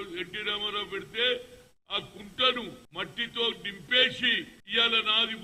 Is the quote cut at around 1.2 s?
no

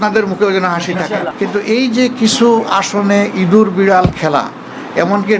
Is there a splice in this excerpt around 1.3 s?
yes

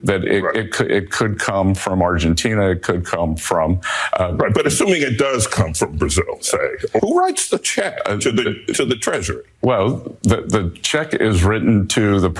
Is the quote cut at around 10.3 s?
no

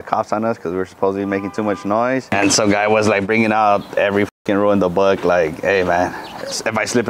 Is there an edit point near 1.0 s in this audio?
no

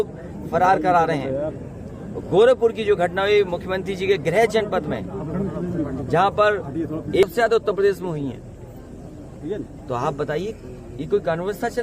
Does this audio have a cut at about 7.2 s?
yes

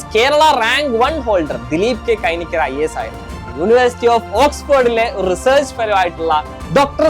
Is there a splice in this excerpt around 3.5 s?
yes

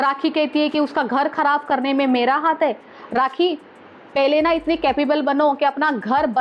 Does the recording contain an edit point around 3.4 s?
no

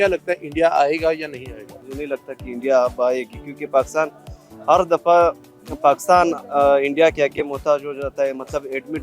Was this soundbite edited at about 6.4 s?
no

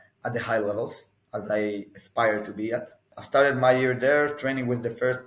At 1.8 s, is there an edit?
no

